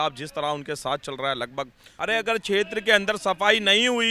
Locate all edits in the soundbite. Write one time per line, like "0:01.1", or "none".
0:01.9